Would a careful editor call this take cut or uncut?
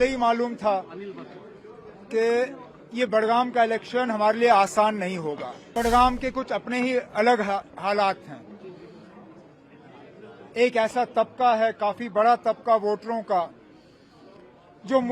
cut